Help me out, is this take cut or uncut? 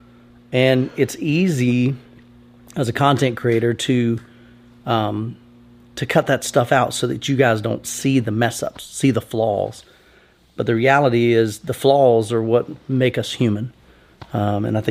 uncut